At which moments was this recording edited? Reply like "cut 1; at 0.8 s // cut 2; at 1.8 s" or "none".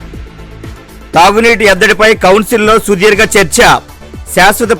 cut 1; at 1.0 s

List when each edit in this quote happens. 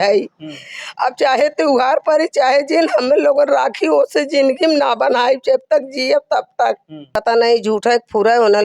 cut 1; at 7.1 s

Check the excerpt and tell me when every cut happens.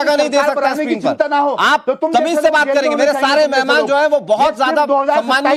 none

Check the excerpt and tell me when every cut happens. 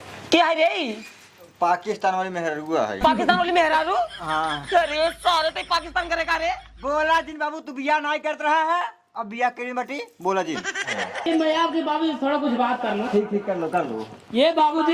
cut 1; at 10.8 s

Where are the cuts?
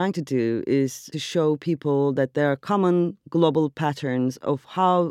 cut 1; at 1.1 s

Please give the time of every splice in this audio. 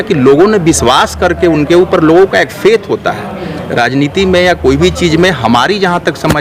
none

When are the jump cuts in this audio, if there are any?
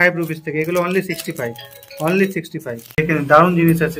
cut 1; at 3.0 s

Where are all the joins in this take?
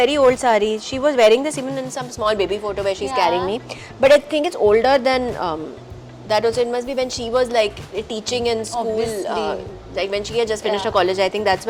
none

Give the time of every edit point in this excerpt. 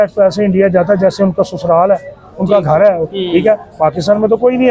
none

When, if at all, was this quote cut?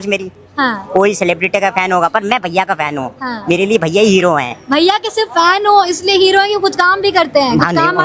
none

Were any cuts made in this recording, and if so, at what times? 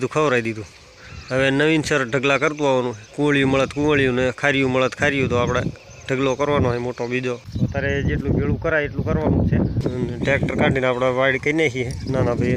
cut 1; at 3.0 s // cut 2; at 7.5 s // cut 3; at 9.8 s

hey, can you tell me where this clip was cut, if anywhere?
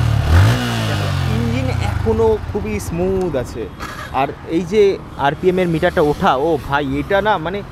none

